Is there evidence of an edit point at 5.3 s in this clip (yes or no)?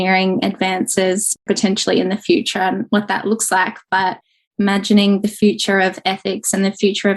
no